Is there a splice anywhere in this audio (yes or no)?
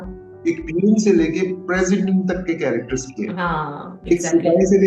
no